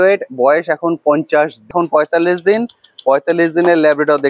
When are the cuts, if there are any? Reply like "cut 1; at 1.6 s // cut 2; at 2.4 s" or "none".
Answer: cut 1; at 1.7 s